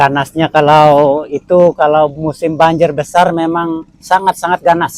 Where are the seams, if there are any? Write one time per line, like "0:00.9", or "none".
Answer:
none